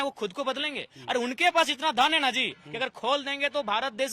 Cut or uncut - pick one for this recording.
uncut